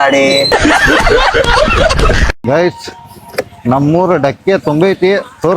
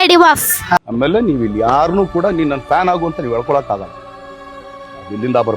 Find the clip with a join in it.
first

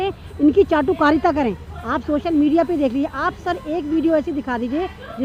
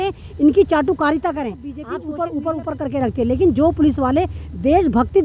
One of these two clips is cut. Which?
second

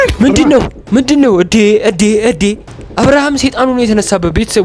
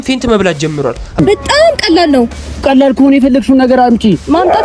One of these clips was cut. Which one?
second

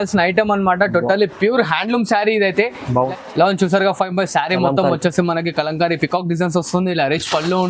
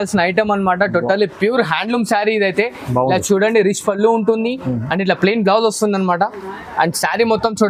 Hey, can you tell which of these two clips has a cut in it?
first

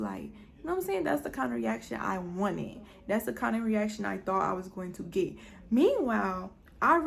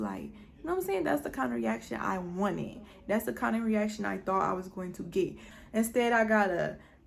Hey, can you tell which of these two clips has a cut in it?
second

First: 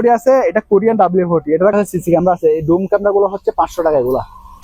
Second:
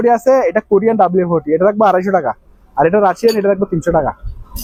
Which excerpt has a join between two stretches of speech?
first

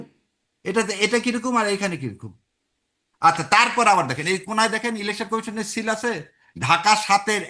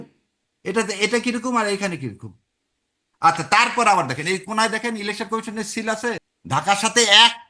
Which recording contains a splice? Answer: second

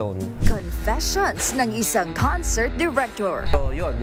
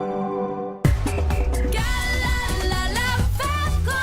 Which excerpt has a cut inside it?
second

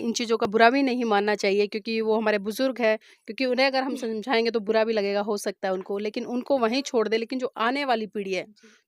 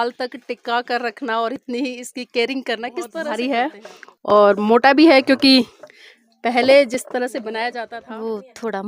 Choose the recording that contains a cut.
second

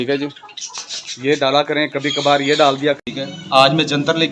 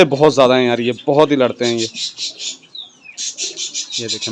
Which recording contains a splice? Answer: first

